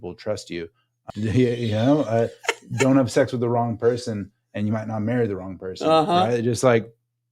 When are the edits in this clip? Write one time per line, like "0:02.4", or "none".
0:01.0